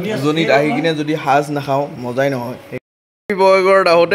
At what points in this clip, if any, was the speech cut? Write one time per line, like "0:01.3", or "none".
0:02.7